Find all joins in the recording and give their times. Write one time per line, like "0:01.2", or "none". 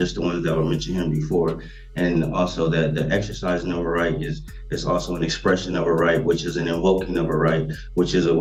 none